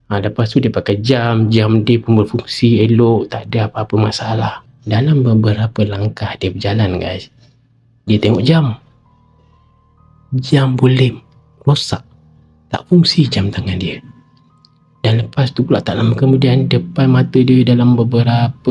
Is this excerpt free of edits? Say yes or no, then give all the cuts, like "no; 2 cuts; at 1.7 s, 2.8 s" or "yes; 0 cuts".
no; 1 cut; at 4.7 s